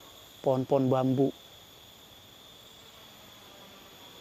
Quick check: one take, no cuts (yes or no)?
yes